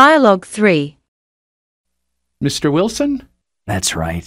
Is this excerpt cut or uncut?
cut